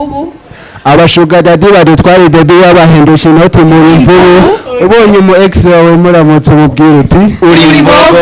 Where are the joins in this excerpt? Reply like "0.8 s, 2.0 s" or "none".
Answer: none